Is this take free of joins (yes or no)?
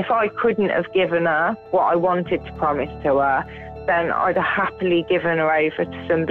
no